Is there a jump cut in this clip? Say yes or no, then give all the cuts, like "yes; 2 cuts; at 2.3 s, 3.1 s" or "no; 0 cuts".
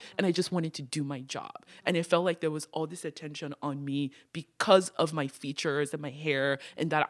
no; 0 cuts